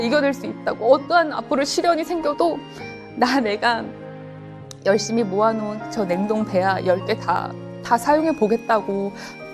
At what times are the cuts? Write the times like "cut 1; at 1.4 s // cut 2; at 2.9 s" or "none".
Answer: none